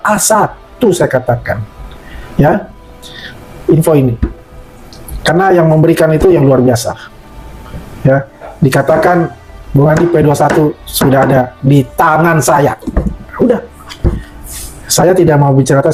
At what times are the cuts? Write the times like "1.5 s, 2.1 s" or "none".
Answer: none